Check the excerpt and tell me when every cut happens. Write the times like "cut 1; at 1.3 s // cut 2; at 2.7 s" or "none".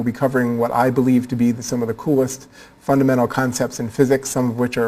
none